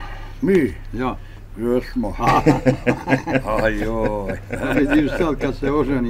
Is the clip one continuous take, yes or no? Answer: yes